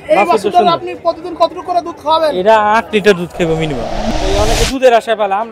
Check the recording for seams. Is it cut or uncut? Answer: cut